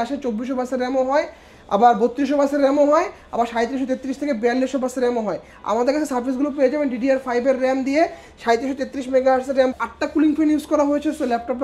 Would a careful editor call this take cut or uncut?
cut